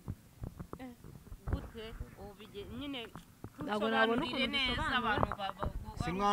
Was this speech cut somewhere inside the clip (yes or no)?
no